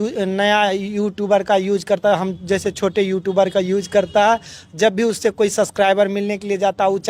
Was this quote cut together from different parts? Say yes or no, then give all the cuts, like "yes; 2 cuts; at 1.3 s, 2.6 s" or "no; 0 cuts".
no; 0 cuts